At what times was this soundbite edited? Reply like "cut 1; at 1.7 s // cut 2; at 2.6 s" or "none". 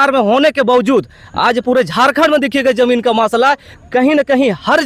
none